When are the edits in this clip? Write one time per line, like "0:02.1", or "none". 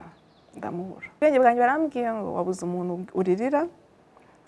0:01.2